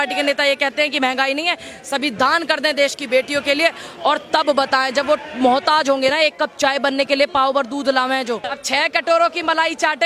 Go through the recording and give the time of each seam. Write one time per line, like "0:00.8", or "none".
0:08.5

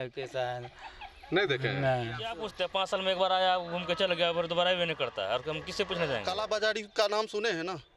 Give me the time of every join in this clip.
0:02.4
0:06.3

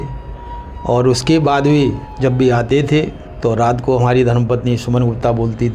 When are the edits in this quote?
0:02.1
0:03.2

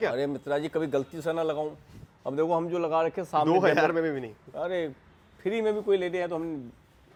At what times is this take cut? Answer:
none

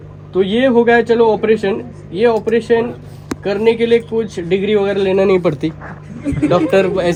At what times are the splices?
none

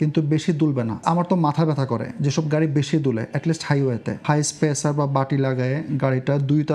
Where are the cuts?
0:01.0
0:04.2

